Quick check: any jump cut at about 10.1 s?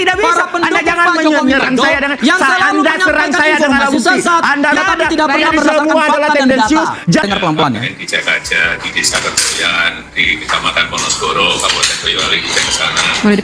no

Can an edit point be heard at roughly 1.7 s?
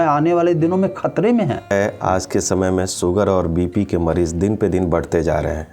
yes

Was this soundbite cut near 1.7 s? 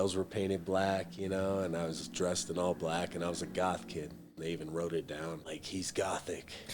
no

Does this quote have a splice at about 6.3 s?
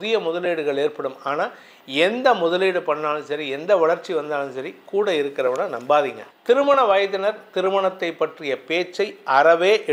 yes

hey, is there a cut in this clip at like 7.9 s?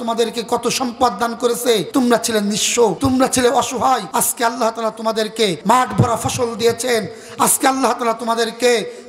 no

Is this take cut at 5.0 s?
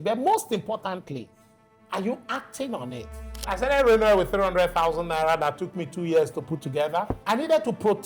no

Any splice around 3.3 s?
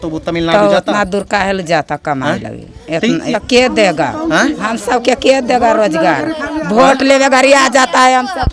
yes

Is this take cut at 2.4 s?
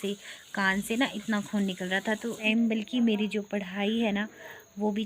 yes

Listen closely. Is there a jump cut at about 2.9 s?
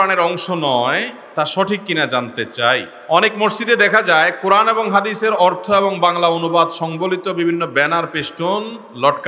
yes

